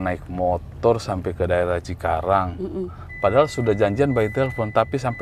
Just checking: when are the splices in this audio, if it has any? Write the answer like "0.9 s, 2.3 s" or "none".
none